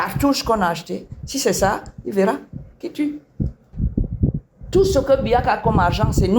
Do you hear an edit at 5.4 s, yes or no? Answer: no